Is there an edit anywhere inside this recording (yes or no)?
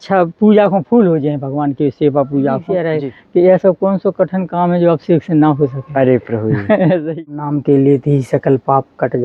yes